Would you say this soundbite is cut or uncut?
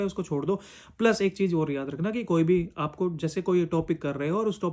uncut